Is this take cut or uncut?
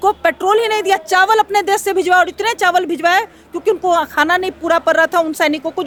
uncut